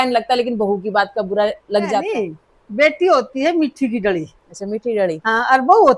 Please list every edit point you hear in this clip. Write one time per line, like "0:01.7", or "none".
0:02.1